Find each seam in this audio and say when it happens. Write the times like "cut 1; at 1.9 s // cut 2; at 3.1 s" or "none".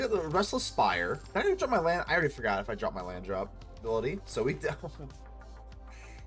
cut 1; at 1.2 s // cut 2; at 3.8 s